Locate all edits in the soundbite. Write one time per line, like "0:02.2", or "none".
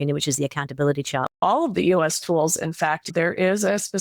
0:01.4
0:03.1